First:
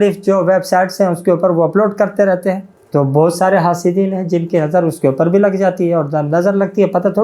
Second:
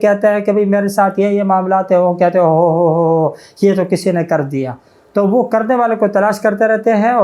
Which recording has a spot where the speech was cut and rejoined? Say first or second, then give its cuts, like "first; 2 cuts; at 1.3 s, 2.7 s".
first; 1 cut; at 2.7 s